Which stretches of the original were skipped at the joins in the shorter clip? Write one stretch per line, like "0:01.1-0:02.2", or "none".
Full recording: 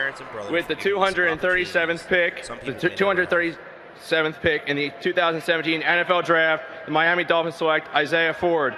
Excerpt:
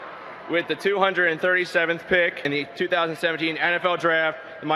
0:02.4-0:04.6

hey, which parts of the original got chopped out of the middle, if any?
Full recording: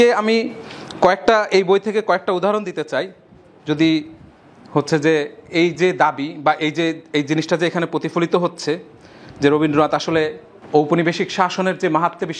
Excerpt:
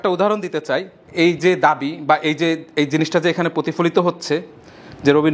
0:03.2-0:05.4

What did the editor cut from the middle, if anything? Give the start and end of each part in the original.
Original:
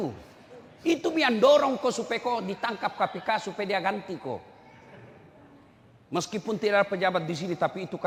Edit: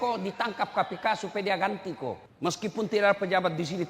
0:04.5-0:06.0

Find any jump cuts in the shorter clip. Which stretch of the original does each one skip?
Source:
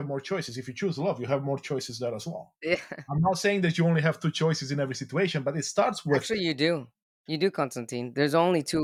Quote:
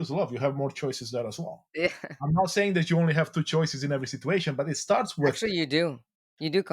none

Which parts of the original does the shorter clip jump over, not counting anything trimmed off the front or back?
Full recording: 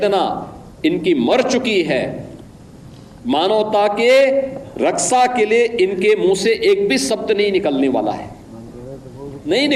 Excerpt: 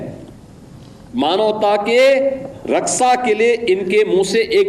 none

